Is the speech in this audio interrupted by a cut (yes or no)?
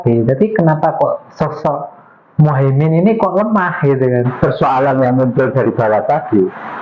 yes